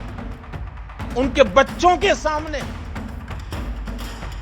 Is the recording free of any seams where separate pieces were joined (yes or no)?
no